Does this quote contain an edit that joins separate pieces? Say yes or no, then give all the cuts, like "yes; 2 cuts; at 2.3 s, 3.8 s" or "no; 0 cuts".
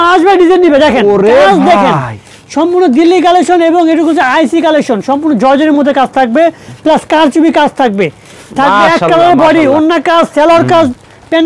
no; 0 cuts